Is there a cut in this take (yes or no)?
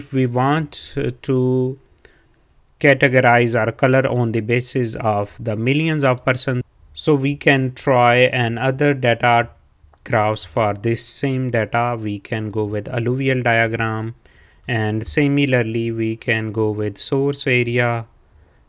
yes